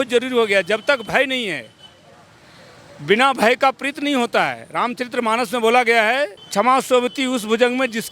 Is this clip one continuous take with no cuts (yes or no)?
yes